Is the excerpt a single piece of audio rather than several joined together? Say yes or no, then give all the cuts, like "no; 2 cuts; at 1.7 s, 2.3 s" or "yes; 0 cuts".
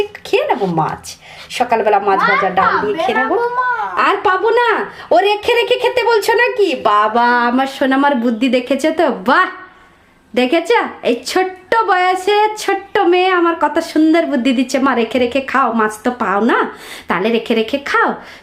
yes; 0 cuts